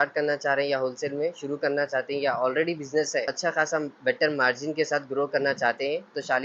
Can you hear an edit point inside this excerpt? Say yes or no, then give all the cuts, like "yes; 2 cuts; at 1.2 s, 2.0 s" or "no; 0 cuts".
yes; 1 cut; at 3.3 s